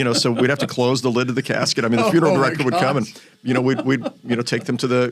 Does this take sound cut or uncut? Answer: uncut